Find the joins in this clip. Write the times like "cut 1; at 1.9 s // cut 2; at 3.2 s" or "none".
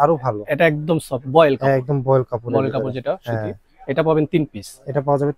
none

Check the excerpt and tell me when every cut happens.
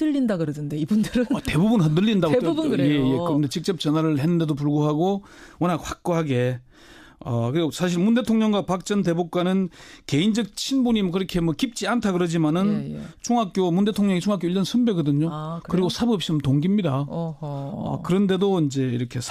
none

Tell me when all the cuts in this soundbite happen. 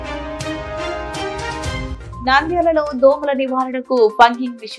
cut 1; at 2.0 s

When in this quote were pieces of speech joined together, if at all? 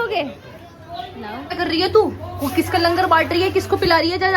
cut 1; at 1.4 s

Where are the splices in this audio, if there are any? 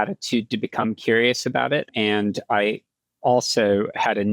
cut 1; at 1.9 s

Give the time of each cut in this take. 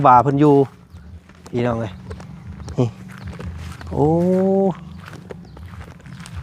none

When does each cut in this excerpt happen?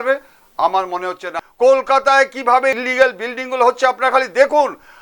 cut 1; at 1.2 s // cut 2; at 2.8 s

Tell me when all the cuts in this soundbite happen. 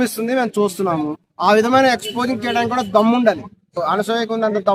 cut 1; at 1.2 s // cut 2; at 3.8 s

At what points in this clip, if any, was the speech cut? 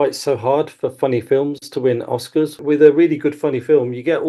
cut 1; at 2.6 s

